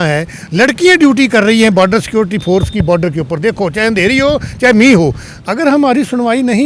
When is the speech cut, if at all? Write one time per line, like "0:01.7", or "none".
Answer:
0:05.3